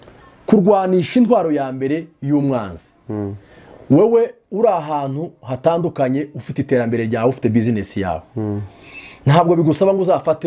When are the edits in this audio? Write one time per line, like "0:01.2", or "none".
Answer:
none